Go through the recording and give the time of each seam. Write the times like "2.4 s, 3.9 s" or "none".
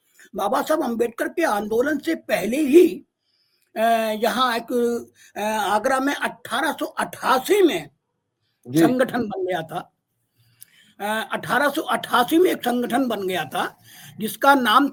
none

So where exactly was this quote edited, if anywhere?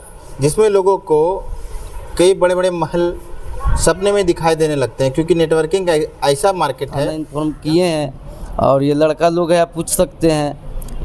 7.2 s

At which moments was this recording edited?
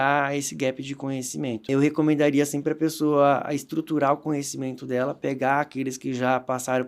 1.7 s

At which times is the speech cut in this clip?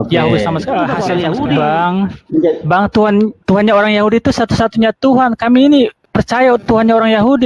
1.0 s

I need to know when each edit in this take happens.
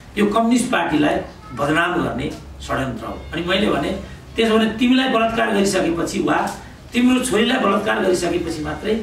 none

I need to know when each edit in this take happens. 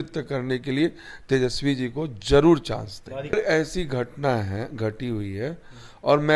3.4 s

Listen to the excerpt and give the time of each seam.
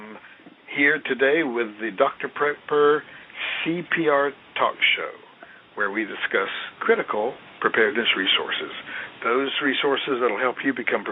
7.8 s

